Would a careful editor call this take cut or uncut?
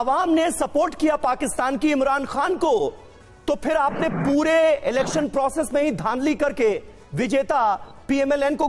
uncut